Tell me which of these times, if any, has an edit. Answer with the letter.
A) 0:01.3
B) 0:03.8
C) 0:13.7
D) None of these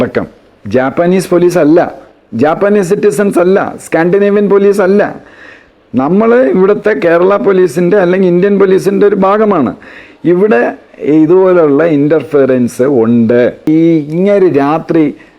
C